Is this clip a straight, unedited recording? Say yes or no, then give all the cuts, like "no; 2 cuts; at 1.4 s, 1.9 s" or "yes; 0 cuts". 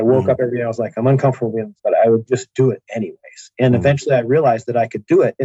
no; 1 cut; at 1.7 s